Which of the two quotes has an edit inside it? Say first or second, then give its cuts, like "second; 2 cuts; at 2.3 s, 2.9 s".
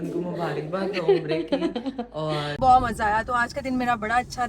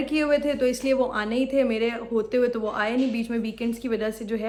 first; 1 cut; at 2.5 s